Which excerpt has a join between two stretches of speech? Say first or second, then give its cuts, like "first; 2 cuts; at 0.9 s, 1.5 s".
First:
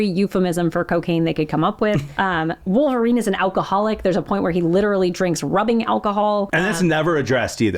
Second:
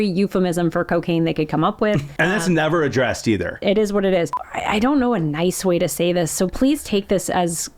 second; 3 cuts; at 2.1 s, 3.6 s, 4.3 s